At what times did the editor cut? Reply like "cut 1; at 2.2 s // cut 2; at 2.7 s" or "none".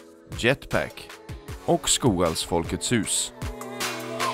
cut 1; at 3.3 s